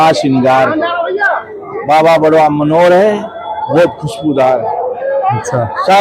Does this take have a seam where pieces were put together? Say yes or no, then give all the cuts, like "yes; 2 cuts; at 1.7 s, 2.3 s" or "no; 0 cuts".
no; 0 cuts